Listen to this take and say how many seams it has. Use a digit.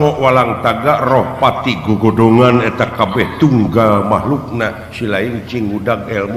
0